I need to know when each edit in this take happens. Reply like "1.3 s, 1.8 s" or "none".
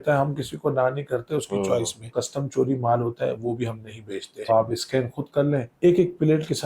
2.0 s, 4.5 s, 5.7 s